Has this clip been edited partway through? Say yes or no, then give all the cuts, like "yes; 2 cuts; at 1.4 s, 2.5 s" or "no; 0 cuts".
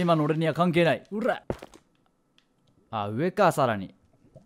yes; 1 cut; at 1.4 s